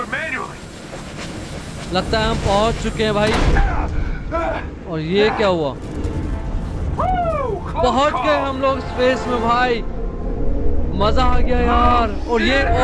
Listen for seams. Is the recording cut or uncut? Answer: uncut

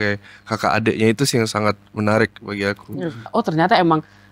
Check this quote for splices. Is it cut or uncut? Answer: cut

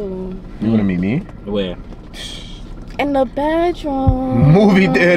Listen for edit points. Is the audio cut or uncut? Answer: uncut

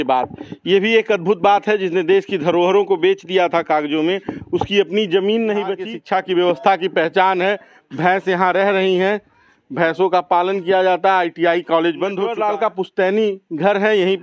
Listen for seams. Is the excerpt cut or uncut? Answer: cut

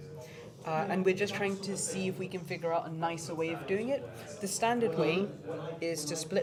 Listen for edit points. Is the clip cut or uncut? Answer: uncut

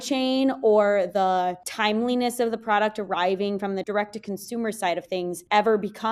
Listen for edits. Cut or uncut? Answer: uncut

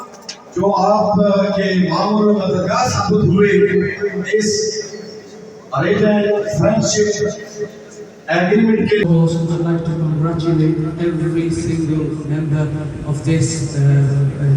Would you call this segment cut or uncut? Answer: cut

